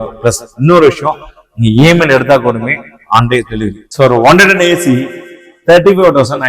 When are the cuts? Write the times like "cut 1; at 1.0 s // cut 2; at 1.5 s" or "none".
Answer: cut 1; at 3.8 s